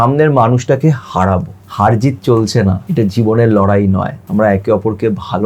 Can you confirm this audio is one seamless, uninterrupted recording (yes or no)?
no